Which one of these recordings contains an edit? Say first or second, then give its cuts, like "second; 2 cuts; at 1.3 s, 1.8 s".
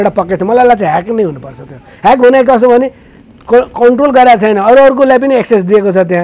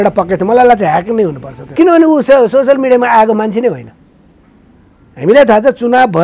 second; 1 cut; at 1.7 s